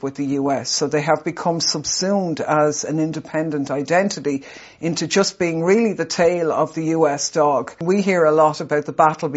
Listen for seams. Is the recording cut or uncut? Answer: cut